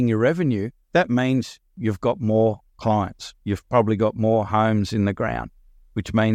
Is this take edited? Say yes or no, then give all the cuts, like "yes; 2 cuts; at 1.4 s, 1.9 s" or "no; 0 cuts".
no; 0 cuts